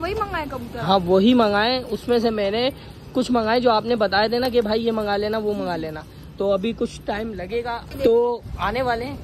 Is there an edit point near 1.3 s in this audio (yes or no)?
no